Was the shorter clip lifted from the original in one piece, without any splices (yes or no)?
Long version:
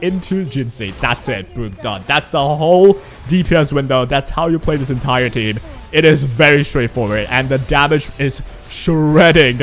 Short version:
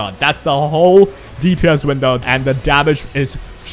no